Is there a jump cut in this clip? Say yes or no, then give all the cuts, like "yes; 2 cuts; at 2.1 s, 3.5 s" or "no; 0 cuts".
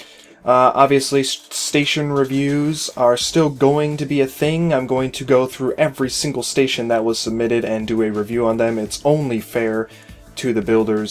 yes; 1 cut; at 6.3 s